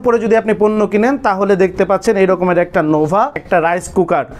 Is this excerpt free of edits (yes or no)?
no